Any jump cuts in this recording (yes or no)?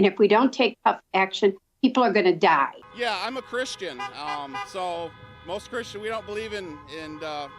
yes